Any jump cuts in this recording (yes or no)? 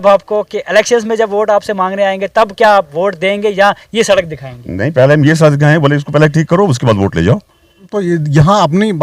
yes